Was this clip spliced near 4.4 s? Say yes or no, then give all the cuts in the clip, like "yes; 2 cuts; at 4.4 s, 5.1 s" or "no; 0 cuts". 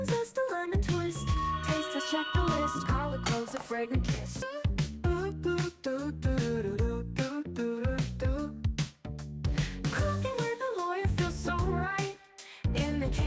yes; 1 cut; at 4.4 s